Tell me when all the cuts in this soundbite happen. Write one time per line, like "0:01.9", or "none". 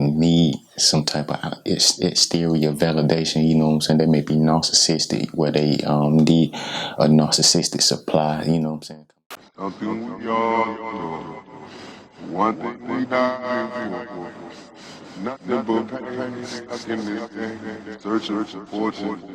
0:08.8